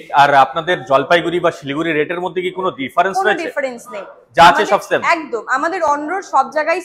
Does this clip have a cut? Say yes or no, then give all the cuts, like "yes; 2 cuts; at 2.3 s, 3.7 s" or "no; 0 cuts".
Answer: no; 0 cuts